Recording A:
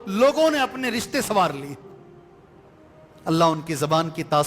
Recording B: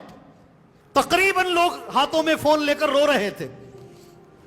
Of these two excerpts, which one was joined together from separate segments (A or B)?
A